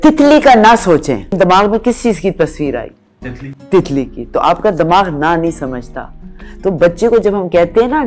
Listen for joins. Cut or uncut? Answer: cut